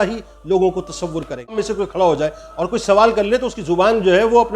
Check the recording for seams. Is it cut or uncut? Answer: cut